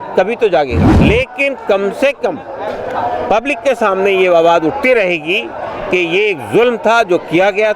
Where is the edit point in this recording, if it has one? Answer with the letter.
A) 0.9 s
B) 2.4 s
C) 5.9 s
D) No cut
A